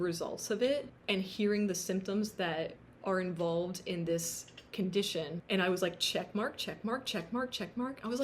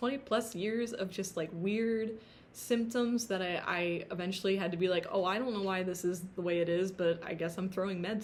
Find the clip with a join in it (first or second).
first